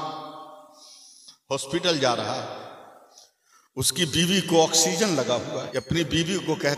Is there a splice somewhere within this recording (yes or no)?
yes